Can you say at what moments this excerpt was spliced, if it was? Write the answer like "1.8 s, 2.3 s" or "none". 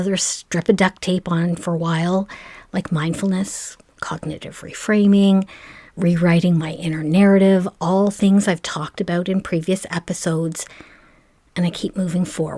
none

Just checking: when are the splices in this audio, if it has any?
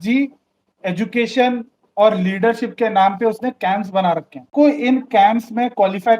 4.5 s

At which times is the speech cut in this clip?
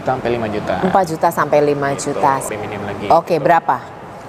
2.4 s

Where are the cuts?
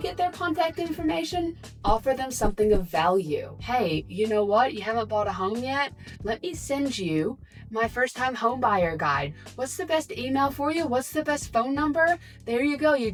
none

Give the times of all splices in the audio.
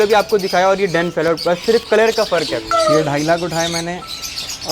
2.7 s

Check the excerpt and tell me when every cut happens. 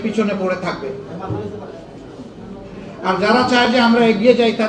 none

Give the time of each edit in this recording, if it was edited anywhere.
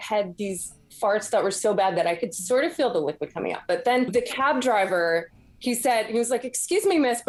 none

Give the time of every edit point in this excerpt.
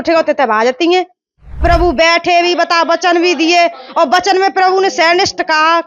1.6 s

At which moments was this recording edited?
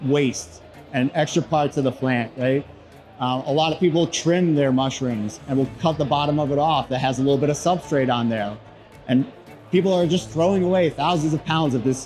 none

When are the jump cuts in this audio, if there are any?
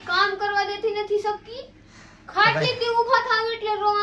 none

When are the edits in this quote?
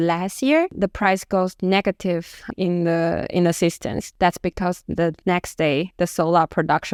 none

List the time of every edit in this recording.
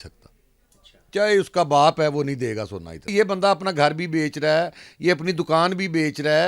3.0 s

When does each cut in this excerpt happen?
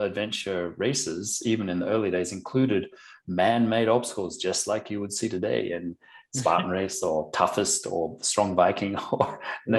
none

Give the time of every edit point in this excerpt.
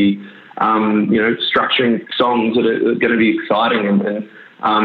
2.0 s

